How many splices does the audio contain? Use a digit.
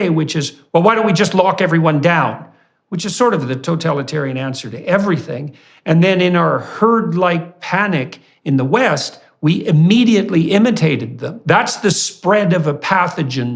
1